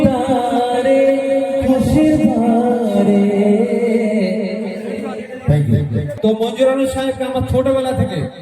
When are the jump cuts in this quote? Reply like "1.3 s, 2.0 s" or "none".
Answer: 6.1 s